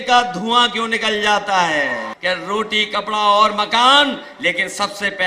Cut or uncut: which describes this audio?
cut